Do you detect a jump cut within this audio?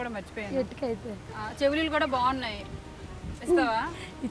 yes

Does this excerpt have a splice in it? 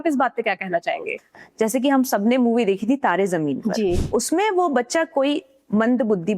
yes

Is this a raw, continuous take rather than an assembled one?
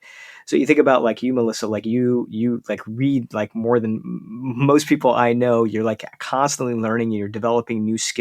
yes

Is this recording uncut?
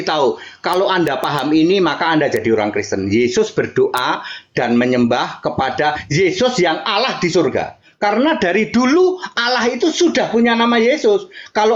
yes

